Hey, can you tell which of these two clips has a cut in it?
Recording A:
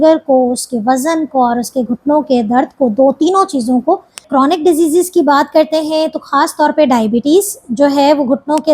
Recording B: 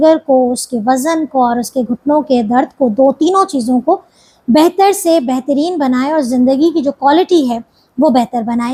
A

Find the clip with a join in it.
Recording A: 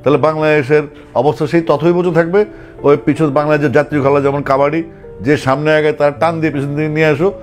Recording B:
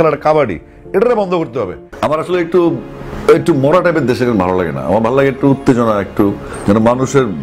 B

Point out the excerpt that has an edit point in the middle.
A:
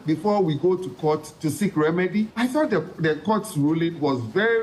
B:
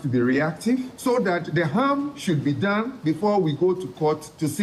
B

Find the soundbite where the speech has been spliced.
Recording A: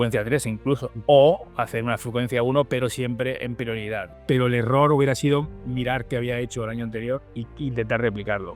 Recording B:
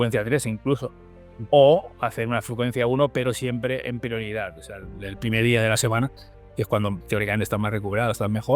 A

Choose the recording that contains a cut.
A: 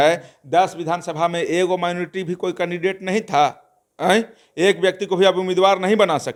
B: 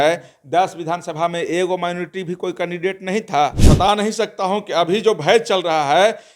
B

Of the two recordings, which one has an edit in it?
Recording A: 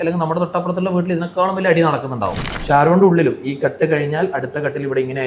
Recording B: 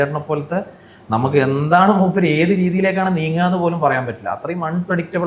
A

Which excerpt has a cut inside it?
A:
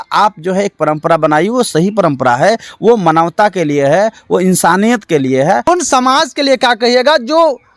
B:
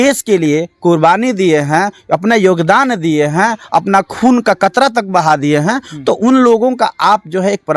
A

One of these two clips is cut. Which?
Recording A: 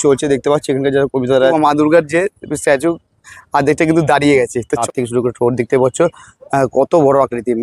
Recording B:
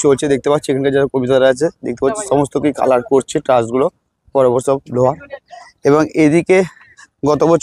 A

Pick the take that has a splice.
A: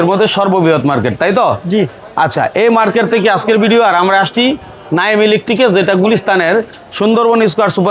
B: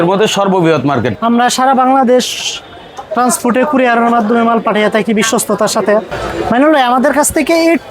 B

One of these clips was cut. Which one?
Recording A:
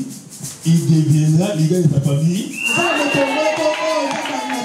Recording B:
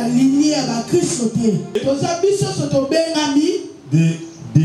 B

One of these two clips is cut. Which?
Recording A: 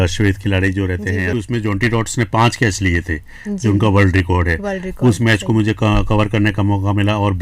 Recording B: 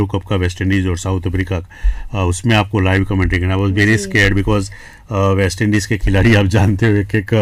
A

